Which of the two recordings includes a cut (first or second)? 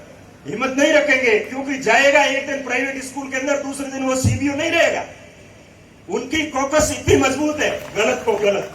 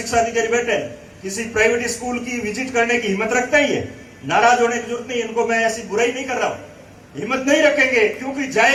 first